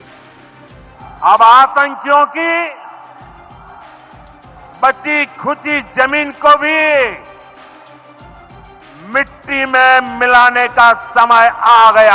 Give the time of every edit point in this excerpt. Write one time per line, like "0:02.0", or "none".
0:01.0